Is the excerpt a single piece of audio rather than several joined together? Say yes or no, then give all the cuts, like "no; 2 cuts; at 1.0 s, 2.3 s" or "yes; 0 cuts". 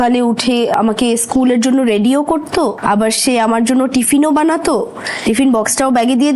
no; 2 cuts; at 0.7 s, 2.8 s